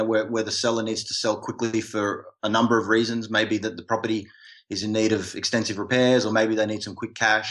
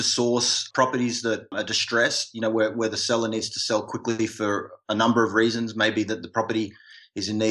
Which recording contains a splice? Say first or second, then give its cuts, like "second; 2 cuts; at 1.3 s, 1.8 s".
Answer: second; 1 cut; at 1.5 s